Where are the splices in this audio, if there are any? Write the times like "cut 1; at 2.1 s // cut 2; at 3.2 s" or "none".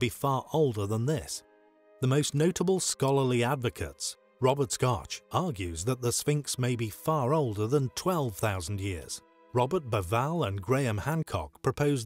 cut 1; at 4.6 s